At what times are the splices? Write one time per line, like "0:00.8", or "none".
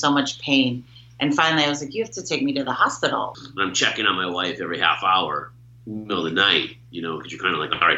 0:03.3